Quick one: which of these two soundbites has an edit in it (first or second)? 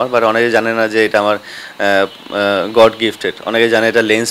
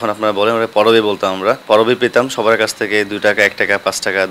second